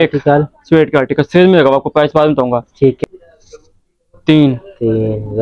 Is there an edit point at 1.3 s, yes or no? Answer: no